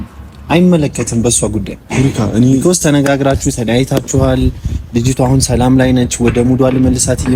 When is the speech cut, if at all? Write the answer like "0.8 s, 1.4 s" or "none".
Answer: none